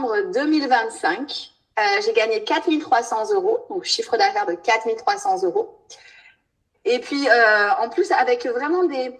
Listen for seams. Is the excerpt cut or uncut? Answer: uncut